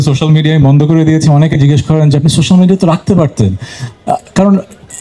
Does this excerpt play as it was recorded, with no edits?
yes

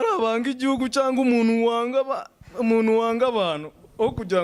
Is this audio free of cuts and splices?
yes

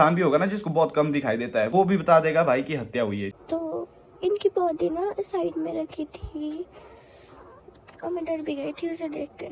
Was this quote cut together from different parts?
yes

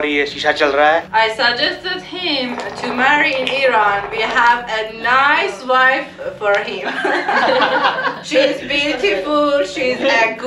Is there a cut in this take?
yes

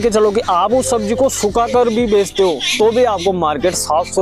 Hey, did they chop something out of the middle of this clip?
no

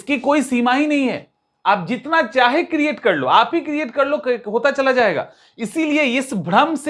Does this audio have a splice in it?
no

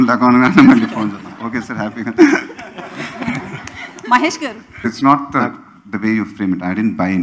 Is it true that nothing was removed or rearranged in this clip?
no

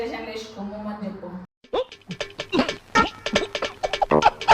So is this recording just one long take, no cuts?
no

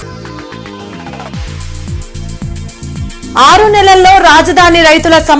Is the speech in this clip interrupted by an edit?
no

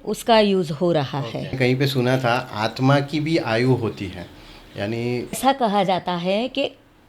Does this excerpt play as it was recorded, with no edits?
no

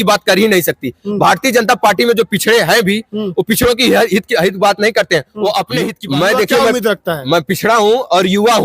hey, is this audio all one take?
no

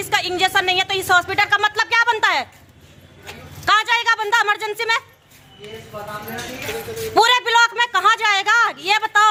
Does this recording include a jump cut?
no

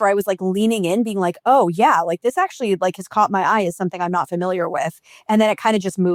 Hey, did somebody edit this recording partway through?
no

